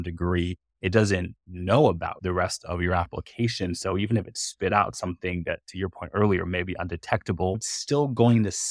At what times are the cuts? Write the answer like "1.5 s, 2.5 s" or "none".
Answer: 2.2 s, 7.7 s